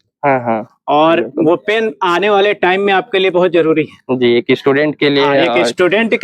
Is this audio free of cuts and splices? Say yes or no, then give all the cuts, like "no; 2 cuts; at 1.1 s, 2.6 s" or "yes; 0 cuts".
yes; 0 cuts